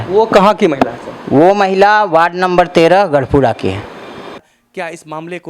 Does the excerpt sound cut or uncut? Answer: cut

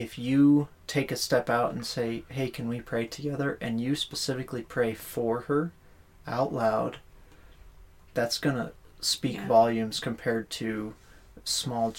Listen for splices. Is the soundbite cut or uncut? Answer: uncut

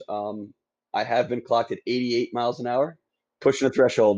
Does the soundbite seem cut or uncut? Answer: cut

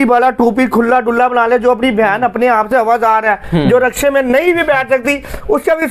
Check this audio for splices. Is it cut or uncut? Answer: uncut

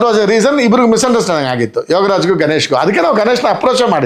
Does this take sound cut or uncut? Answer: uncut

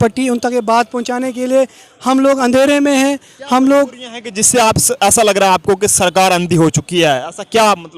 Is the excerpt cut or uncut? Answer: uncut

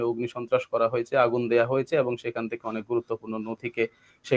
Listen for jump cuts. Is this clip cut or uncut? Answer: uncut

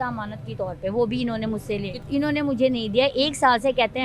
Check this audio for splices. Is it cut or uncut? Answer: cut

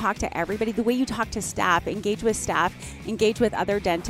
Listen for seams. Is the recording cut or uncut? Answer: uncut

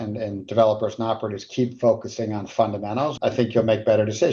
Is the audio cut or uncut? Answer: cut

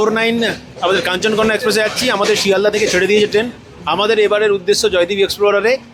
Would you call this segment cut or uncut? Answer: uncut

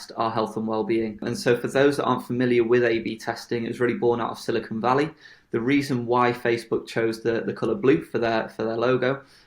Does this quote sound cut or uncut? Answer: cut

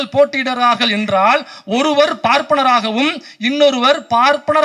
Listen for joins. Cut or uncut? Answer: uncut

